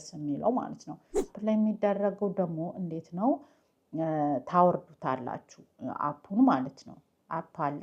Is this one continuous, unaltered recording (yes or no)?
no